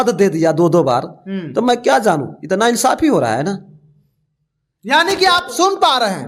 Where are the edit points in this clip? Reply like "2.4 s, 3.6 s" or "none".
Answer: none